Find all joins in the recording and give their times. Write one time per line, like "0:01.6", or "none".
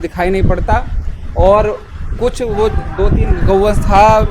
none